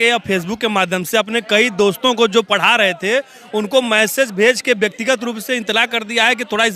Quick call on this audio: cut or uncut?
uncut